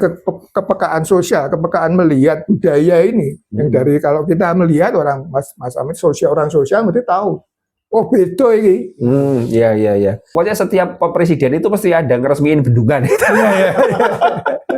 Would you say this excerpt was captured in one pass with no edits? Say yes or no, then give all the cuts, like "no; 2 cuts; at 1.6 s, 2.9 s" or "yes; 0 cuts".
no; 1 cut; at 10.2 s